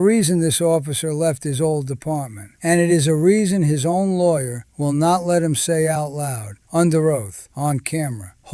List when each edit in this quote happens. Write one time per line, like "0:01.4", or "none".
none